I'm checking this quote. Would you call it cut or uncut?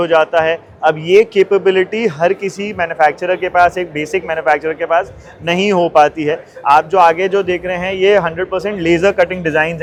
uncut